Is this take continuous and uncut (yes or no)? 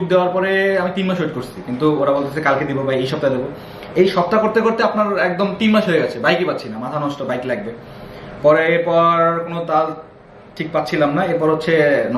yes